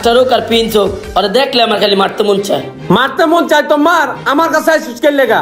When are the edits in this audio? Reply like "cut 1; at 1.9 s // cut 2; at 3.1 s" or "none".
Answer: none